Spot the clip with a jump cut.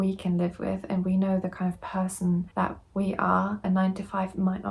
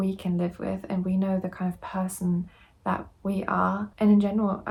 first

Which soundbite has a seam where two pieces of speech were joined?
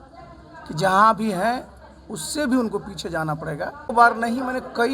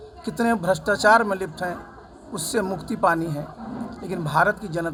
first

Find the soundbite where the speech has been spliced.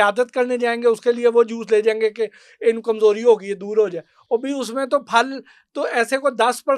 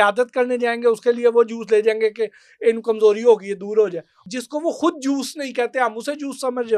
second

